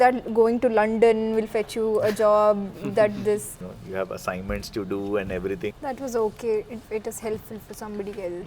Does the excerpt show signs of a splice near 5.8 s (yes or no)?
yes